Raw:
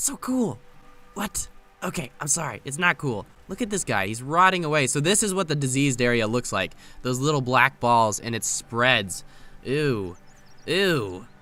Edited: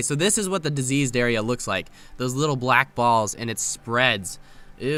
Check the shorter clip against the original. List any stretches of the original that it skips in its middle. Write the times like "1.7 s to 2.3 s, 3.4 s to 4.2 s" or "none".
none